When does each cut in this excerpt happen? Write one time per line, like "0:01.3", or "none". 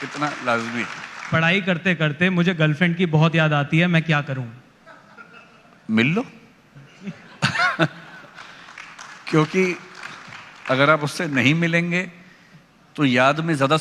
0:01.3